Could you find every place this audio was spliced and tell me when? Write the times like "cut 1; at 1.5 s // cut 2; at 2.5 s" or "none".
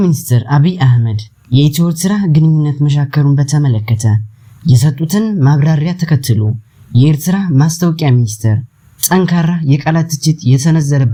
none